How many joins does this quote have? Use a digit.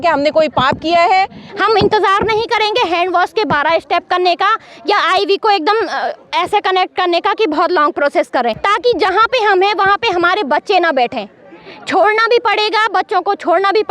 2